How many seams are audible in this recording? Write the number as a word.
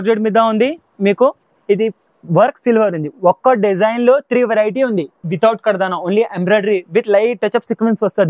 one